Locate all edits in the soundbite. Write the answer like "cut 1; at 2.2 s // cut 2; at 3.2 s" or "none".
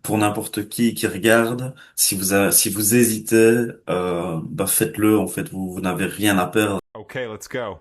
cut 1; at 6.8 s